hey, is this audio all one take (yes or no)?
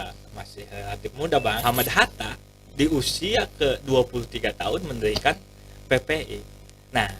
no